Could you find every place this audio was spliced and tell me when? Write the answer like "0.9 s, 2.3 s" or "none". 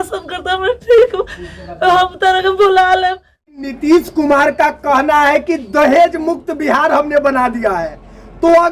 3.7 s